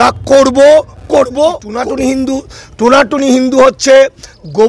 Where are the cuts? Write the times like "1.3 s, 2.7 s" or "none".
1.8 s